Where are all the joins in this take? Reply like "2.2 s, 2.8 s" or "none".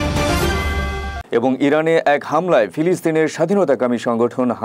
1.0 s